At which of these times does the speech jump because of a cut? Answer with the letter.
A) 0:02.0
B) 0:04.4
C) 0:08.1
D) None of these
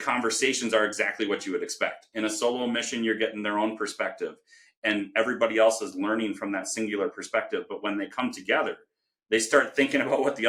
D